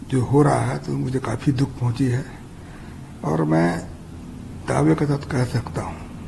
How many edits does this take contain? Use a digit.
0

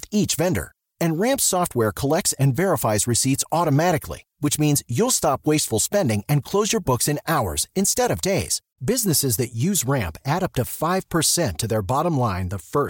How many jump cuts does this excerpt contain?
0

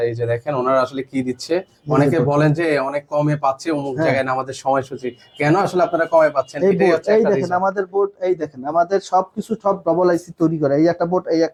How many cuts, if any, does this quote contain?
0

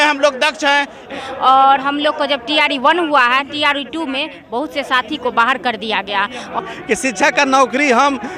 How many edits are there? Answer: 2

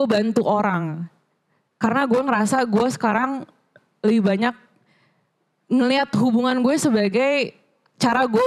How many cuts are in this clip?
0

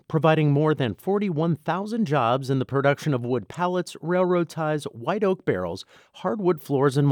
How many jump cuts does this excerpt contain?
0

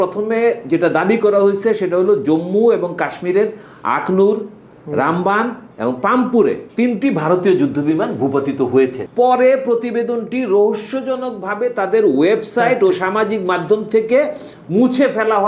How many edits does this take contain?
2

